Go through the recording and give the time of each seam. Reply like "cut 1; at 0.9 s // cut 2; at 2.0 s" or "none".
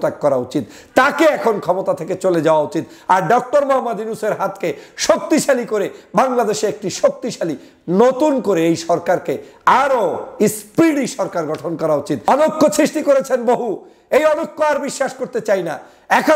cut 1; at 12.3 s